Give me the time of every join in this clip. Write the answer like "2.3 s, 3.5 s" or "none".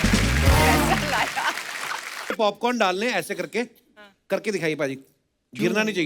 2.3 s